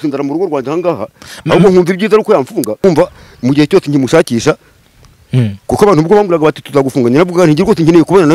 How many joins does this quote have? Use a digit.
1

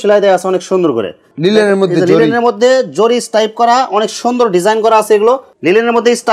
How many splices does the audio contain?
2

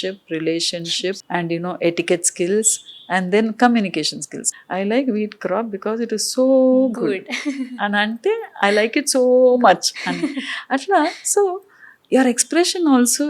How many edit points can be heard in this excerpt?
2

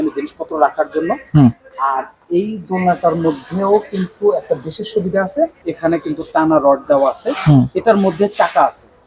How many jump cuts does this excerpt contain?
1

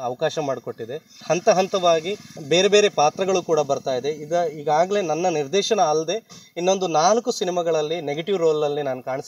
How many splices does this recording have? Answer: 2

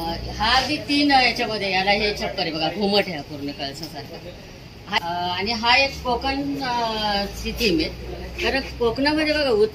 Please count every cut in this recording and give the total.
1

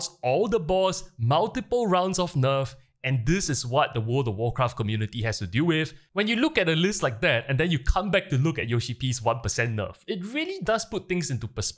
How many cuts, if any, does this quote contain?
1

